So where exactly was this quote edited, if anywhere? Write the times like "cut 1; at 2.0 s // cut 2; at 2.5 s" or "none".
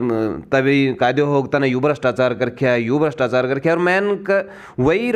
none

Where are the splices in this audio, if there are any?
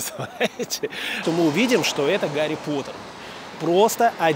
cut 1; at 1.2 s

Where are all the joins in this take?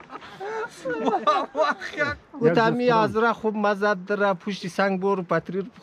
cut 1; at 2.2 s

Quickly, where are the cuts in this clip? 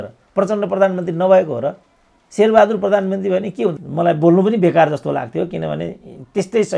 cut 1; at 3.8 s

